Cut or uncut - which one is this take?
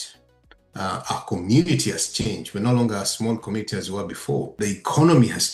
cut